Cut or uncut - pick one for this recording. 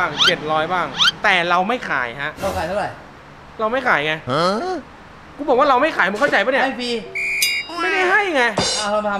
uncut